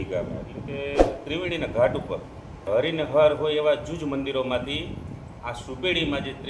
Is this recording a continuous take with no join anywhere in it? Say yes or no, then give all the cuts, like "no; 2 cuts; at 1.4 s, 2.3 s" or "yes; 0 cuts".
no; 1 cut; at 2.7 s